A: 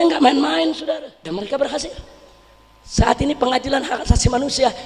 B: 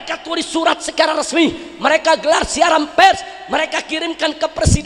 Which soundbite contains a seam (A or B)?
A